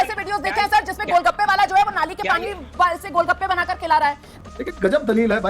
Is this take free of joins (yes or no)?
no